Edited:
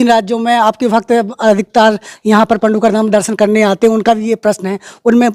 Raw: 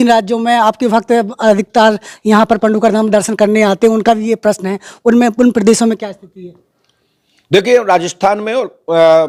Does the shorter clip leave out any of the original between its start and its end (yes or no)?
no